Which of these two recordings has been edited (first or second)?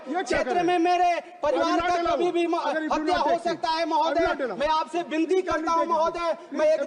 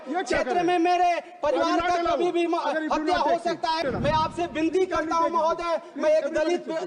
second